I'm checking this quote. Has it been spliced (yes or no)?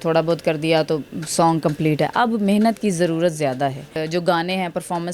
yes